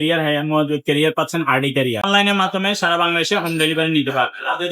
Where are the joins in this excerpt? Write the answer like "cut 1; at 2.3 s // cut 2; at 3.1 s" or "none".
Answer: cut 1; at 2.1 s